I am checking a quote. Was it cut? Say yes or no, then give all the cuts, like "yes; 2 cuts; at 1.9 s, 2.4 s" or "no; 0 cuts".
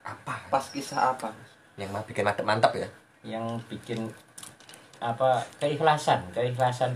no; 0 cuts